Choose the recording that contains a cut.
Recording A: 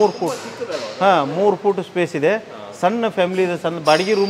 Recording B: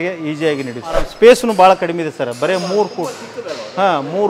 B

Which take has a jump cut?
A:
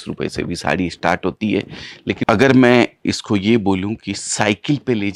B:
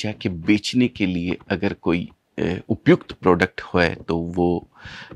A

